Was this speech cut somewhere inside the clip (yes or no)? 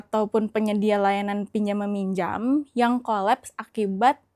no